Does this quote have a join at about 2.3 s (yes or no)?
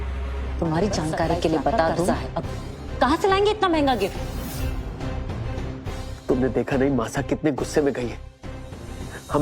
yes